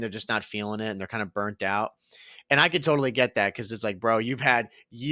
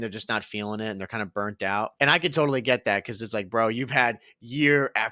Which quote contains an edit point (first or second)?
second